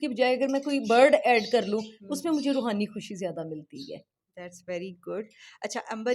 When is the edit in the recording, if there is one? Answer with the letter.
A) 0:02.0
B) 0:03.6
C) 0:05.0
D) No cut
D